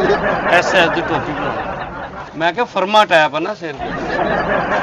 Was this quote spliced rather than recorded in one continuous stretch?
no; 0 cuts

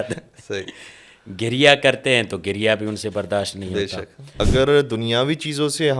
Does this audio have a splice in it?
yes; 1 cut; at 4.4 s

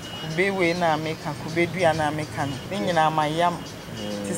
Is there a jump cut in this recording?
yes; 1 cut; at 2.6 s

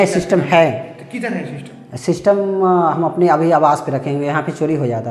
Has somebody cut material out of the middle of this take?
no; 0 cuts

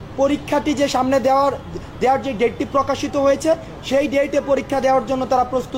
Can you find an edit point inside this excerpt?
no; 0 cuts

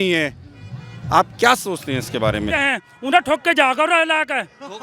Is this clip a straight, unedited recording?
no; 1 cut; at 2.6 s

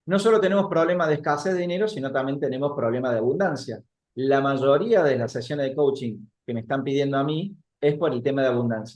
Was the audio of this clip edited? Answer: no; 0 cuts

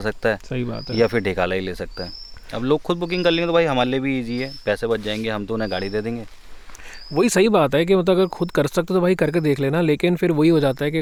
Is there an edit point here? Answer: no; 0 cuts

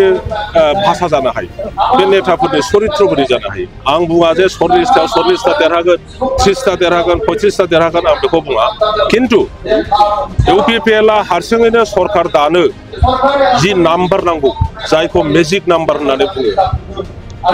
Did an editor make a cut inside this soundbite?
yes; 1 cut; at 3.8 s

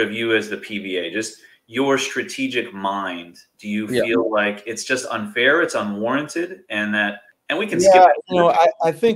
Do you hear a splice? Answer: yes; 1 cut; at 7.3 s

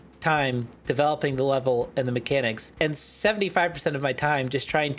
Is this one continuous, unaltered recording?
no; 1 cut; at 2.6 s

